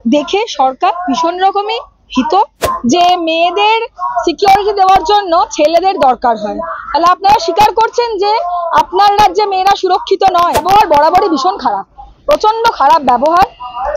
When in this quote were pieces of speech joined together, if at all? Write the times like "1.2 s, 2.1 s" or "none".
2.6 s, 10.6 s